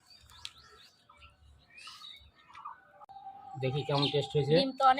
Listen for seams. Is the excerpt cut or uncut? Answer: cut